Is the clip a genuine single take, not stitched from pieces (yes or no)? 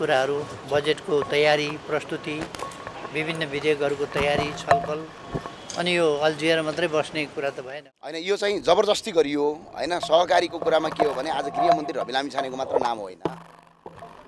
no